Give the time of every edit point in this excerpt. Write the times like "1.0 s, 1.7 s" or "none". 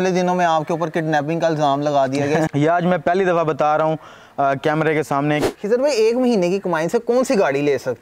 2.5 s, 5.4 s